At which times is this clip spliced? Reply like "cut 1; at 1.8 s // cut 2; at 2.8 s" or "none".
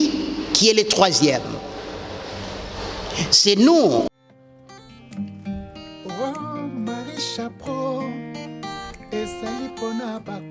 cut 1; at 4.1 s